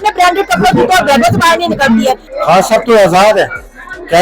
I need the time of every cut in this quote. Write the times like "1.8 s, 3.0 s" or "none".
2.3 s